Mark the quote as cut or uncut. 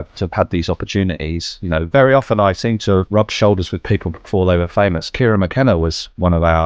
cut